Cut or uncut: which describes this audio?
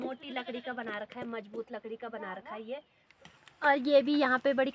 cut